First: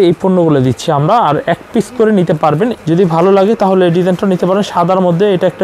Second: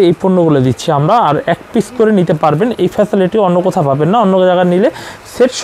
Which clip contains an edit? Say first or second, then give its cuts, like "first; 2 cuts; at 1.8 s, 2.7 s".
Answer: first; 1 cut; at 2.7 s